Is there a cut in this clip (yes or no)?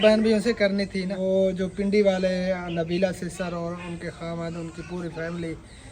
yes